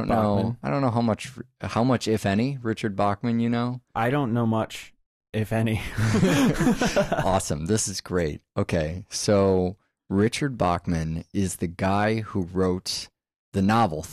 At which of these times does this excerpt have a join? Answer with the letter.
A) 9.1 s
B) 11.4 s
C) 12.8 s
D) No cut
A